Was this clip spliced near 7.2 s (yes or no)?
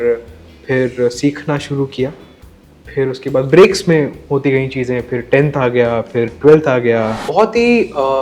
yes